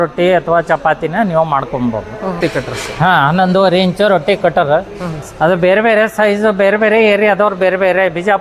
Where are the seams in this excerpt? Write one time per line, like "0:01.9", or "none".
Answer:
0:02.4